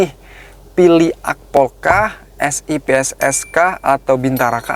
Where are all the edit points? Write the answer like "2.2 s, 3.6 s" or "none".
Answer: none